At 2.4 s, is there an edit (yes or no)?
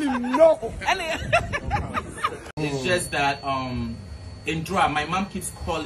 yes